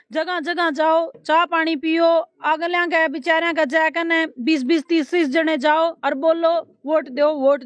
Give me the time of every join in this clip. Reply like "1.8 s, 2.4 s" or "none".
none